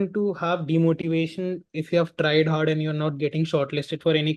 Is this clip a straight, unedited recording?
yes; 0 cuts

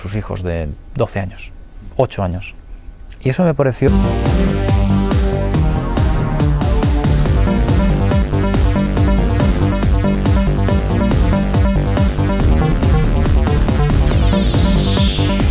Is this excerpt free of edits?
yes; 0 cuts

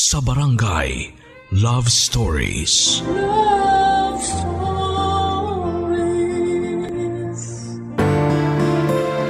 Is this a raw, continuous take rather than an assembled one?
no; 1 cut; at 7.9 s

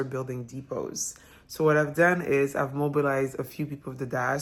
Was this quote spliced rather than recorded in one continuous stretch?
no; 0 cuts

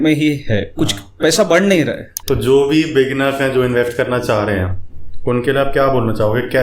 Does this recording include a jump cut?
yes; 1 cut; at 2.1 s

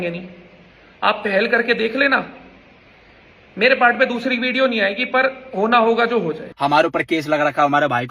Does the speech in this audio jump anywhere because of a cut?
yes; 1 cut; at 6.4 s

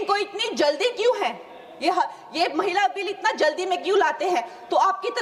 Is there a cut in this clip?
no; 0 cuts

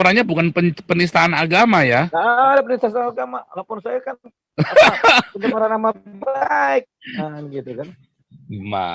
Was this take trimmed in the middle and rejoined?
no; 0 cuts

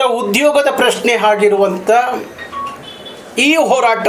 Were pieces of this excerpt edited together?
no; 0 cuts

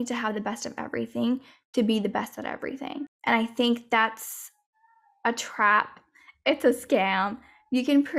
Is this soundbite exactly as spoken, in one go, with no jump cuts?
no; 1 cut; at 3.1 s

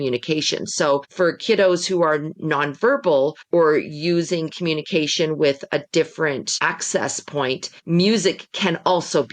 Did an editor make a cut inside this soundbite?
yes; 4 cuts; at 1.1 s, 3.4 s, 6.5 s, 7.7 s

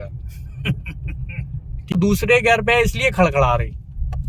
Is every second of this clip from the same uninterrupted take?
no; 1 cut; at 1.9 s

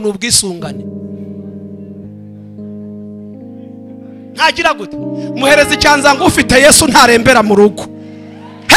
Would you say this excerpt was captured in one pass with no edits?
yes; 0 cuts

